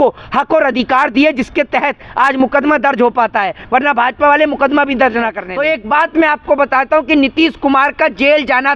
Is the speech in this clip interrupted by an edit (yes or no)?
yes